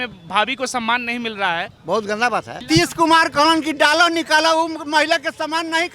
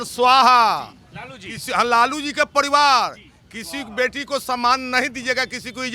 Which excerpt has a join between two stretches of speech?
first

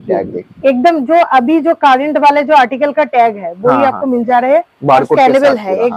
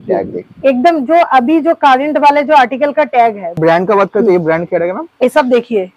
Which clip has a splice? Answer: second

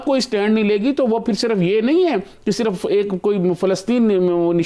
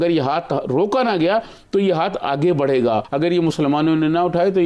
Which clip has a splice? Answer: second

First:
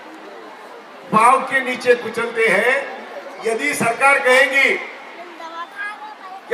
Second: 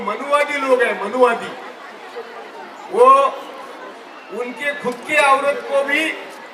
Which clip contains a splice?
first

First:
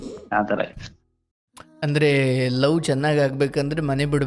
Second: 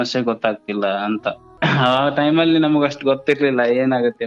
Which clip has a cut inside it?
second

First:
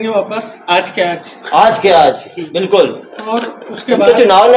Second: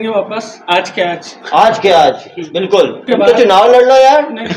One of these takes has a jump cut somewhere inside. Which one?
second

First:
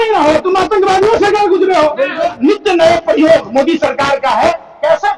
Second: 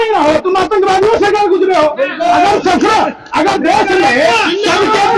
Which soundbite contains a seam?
first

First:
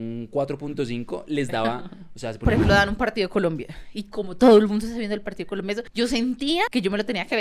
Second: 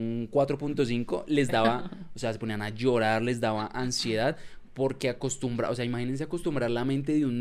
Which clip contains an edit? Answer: first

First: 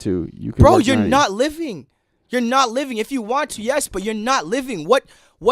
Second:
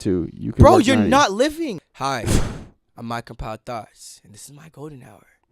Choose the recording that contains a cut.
second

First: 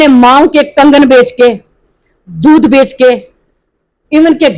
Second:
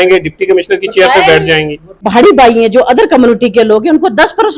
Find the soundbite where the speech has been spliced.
second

